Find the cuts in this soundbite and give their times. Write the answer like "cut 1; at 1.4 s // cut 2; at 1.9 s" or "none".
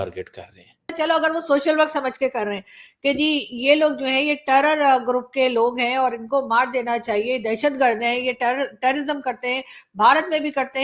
cut 1; at 1.0 s